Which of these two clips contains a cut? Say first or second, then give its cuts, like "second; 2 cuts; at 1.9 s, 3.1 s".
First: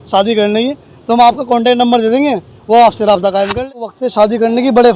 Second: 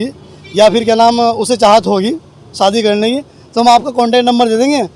first; 1 cut; at 4.0 s